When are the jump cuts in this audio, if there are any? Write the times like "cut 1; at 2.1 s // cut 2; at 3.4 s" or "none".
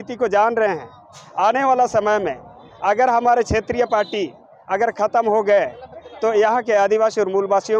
none

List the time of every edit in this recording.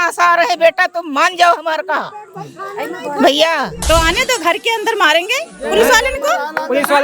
cut 1; at 3.8 s

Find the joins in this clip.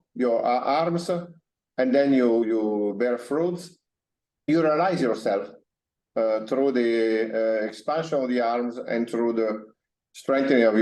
cut 1; at 2.4 s // cut 2; at 4.5 s

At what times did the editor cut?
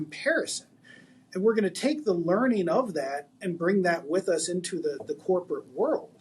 none

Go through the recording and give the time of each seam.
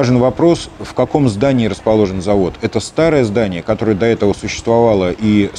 none

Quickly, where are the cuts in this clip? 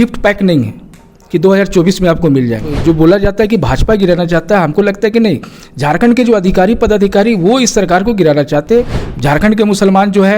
cut 1; at 2.7 s // cut 2; at 9.0 s

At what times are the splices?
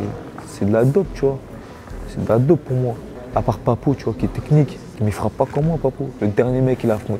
cut 1; at 3.1 s // cut 2; at 5.0 s // cut 3; at 6.1 s

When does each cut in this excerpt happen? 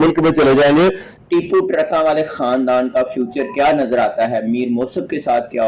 cut 1; at 1.1 s

